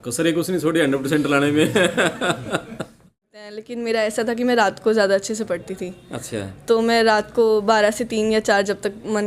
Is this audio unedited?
no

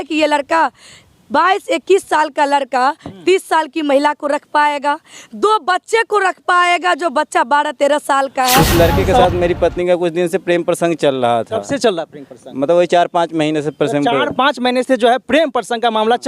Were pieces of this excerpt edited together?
yes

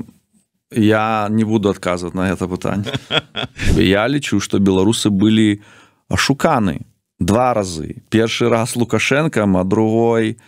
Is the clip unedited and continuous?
no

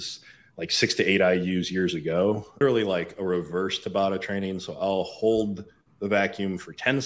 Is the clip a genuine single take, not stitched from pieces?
no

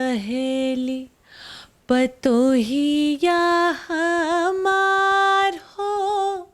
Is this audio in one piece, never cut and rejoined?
yes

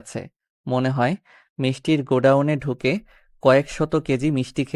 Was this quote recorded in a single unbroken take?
yes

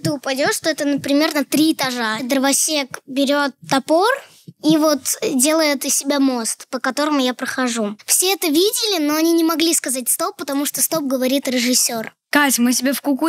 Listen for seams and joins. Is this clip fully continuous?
no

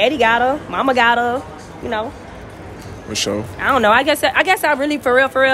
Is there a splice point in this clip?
no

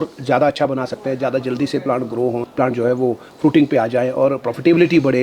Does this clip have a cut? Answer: yes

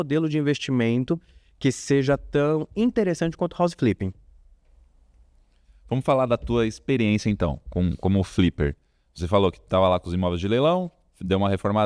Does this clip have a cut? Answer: no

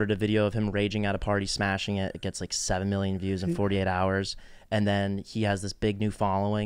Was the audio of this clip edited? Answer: no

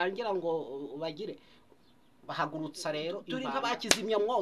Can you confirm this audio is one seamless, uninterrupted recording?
no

